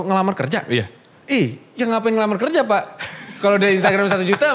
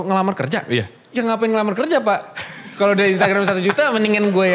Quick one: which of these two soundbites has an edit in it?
second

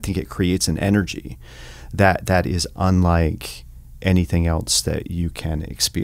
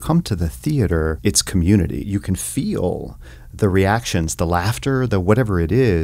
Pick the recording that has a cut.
second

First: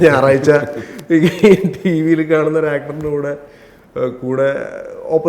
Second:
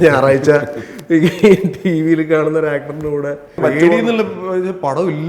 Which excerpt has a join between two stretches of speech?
second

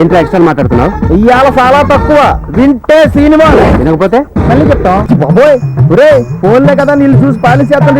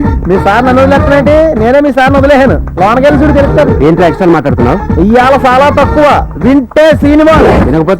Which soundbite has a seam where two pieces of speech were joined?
first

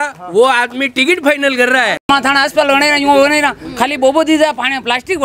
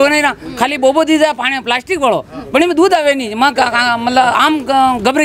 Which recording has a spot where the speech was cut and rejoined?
first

